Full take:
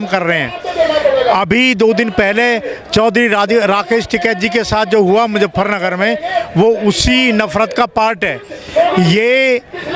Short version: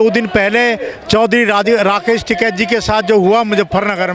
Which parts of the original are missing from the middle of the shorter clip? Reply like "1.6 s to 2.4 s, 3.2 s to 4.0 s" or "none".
none

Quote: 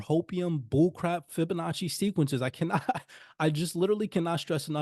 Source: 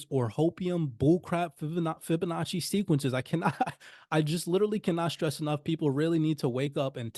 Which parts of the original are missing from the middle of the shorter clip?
1.6 s to 2.0 s

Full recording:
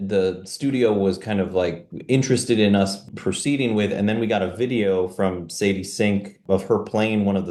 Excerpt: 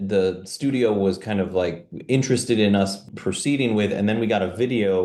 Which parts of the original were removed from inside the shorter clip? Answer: none

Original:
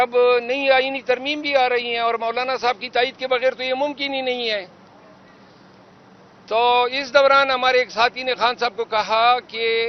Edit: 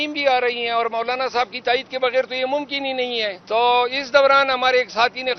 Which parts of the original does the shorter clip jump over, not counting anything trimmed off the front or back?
4.7 s to 6.4 s

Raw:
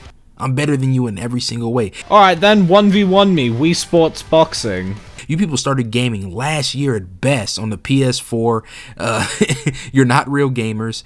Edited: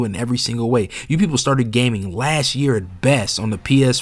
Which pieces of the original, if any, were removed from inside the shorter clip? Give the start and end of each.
2.0 s to 5.1 s

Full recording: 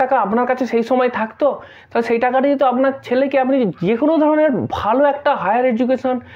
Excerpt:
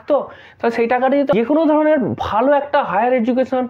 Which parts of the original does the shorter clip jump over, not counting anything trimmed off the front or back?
2.6 s to 3.9 s

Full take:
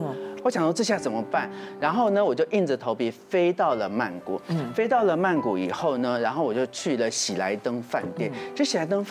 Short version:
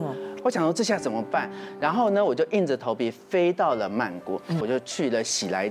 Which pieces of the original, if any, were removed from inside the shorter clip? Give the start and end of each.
4.6 s to 6.5 s

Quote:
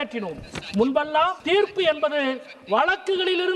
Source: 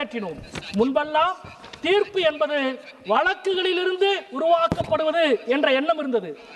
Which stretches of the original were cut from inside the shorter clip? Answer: 1.4 s to 1.8 s

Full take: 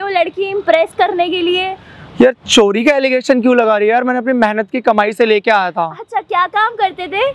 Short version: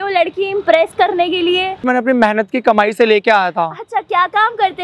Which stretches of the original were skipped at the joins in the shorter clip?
1.9 s to 4.1 s

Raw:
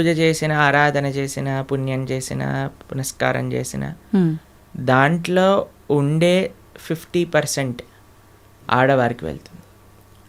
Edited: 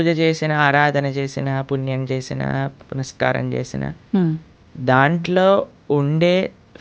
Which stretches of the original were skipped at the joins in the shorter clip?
none

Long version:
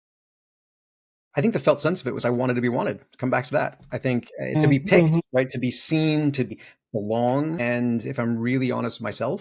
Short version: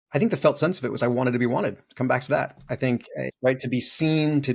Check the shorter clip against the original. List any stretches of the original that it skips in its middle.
4.5 s to 5.2 s

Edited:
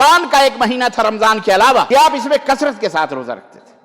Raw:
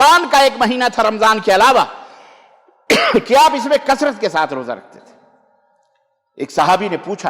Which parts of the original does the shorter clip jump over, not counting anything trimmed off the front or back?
1.9 s to 3.3 s

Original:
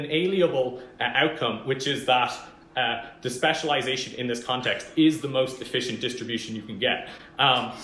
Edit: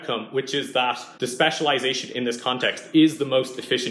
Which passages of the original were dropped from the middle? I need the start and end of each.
2.4 s to 3.1 s

